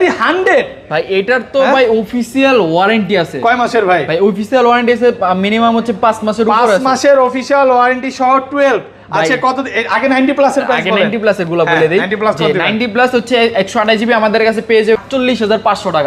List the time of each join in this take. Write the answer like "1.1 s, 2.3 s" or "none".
15.0 s